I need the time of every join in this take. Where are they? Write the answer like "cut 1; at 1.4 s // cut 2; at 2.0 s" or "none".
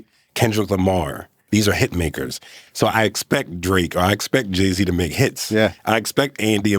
cut 1; at 1.4 s